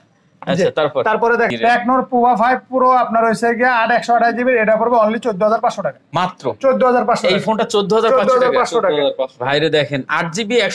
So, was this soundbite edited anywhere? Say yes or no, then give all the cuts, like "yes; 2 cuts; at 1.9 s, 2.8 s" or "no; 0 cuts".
yes; 1 cut; at 1.5 s